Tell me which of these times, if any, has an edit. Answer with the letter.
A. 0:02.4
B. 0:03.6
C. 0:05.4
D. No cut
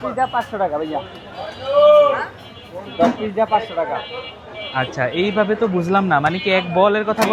D